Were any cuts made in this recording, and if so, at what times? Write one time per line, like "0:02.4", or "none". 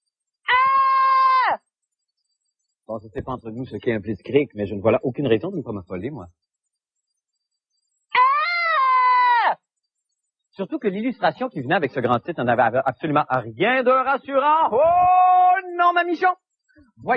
none